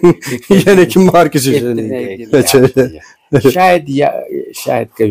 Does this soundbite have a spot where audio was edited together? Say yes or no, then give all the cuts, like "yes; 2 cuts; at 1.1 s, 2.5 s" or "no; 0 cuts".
no; 0 cuts